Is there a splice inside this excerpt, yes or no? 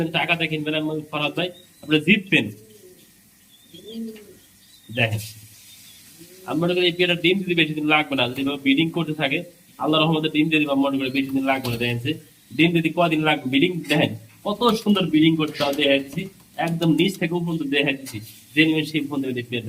no